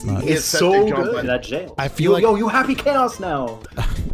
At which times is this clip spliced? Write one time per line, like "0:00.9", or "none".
0:01.2